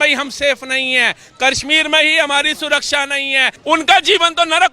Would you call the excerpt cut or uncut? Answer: cut